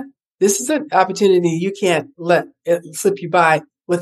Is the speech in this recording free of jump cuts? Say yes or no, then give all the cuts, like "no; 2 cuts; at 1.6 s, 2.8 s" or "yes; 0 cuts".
yes; 0 cuts